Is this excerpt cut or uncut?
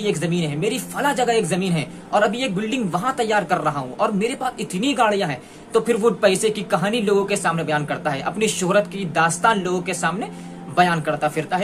uncut